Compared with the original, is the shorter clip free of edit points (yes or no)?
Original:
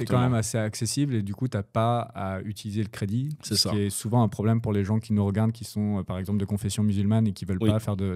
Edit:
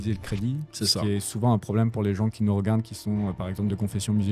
yes